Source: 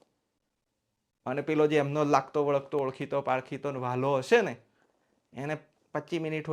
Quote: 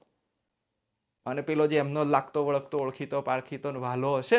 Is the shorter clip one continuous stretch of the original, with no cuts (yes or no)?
yes